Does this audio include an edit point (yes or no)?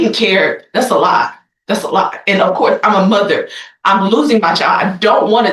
no